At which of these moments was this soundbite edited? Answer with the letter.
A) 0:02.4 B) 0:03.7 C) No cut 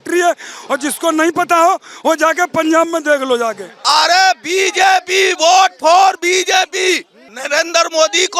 B